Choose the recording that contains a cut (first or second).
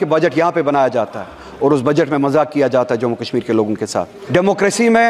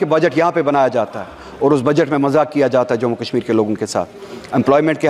first